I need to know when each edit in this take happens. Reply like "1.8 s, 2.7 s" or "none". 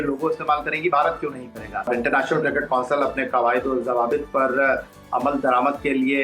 1.9 s